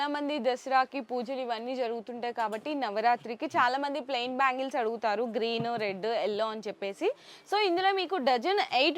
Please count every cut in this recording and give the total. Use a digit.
0